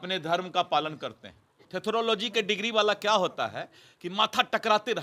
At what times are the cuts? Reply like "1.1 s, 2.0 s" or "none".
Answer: 1.6 s